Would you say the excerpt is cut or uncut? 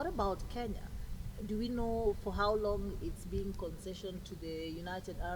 uncut